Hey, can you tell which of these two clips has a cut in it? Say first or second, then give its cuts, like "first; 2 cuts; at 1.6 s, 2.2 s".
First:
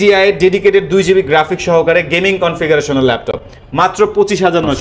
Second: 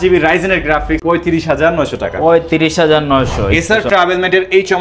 second; 2 cuts; at 1.0 s, 3.5 s